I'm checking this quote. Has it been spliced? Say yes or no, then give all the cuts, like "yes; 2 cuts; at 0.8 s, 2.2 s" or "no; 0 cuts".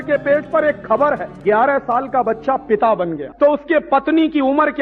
yes; 2 cuts; at 1.4 s, 3.2 s